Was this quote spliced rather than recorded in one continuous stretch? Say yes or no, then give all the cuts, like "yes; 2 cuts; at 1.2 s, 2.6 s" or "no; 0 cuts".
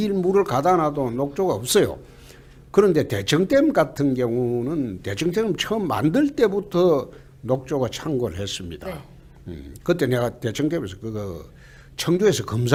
no; 0 cuts